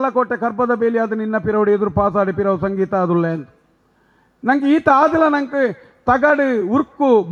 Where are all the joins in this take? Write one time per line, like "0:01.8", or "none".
none